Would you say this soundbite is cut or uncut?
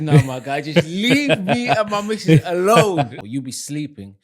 cut